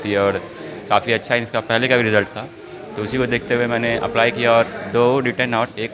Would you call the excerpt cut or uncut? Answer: uncut